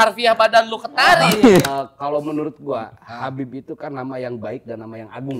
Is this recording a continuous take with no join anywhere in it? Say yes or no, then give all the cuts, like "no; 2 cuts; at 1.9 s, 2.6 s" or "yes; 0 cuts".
no; 1 cut; at 1.6 s